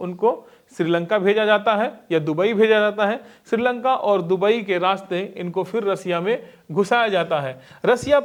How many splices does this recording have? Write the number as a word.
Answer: zero